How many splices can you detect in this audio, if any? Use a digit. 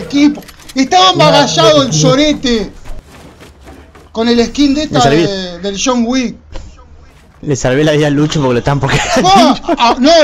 0